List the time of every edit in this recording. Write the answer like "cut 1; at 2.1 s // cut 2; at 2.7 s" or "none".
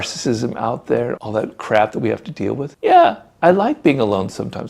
none